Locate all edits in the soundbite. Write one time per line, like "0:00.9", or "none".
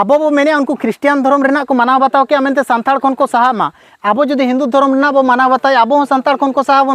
none

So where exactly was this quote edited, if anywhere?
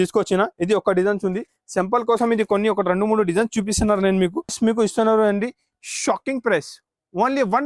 0:04.5

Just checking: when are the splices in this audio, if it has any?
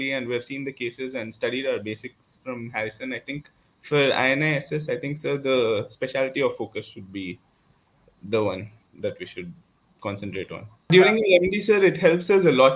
0:10.9

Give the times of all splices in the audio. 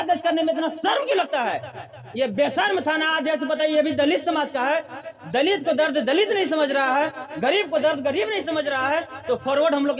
none

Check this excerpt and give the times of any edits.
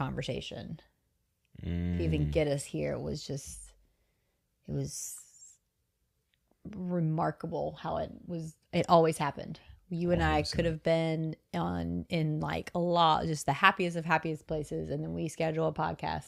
none

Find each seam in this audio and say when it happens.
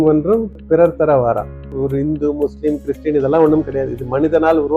0:01.7

